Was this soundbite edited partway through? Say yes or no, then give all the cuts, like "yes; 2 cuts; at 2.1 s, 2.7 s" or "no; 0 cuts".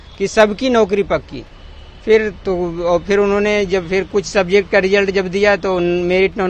no; 0 cuts